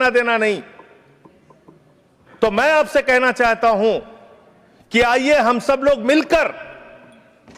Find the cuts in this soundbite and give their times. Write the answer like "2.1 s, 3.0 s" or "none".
none